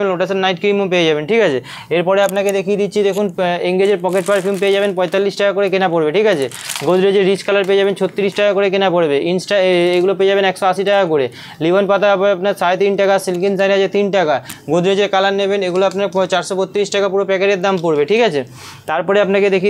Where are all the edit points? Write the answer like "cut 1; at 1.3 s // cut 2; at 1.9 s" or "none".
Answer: none